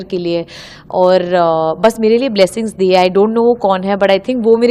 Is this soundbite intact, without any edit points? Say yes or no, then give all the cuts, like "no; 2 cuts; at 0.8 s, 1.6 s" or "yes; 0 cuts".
yes; 0 cuts